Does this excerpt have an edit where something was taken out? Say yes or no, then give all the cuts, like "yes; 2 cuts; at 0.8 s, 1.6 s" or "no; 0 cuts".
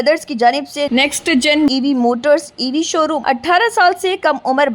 yes; 1 cut; at 3.2 s